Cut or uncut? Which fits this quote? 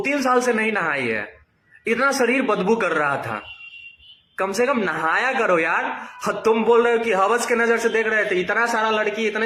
uncut